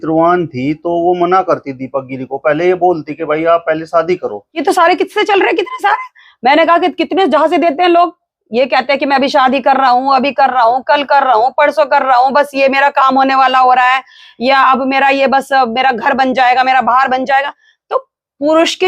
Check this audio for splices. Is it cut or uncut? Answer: uncut